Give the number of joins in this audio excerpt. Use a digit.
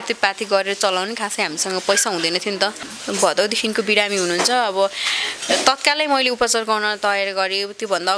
1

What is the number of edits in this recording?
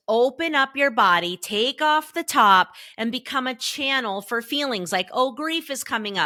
0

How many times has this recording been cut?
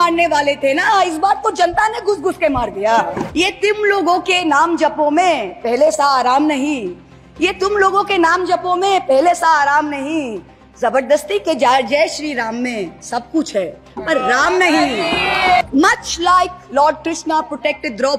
2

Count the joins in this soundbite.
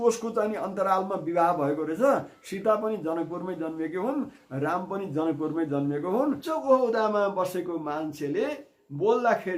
1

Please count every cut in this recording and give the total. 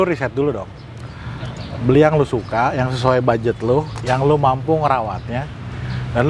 0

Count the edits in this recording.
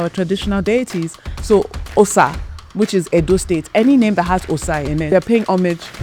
1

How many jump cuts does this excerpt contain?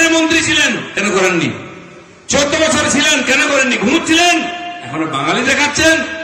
0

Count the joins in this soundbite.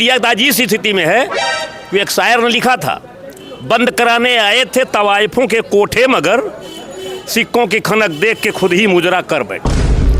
0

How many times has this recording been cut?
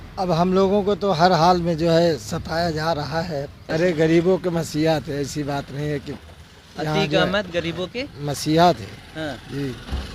1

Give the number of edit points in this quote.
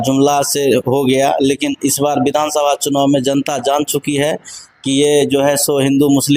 0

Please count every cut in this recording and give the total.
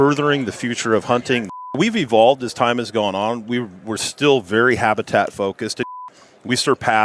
2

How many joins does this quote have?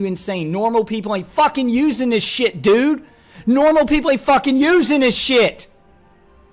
0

